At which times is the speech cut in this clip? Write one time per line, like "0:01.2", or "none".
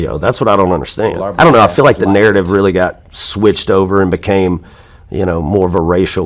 0:01.2